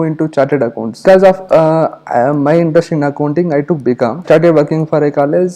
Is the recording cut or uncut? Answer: cut